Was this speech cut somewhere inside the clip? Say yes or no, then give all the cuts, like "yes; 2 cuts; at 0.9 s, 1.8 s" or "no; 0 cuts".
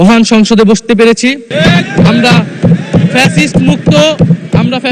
yes; 1 cut; at 1.5 s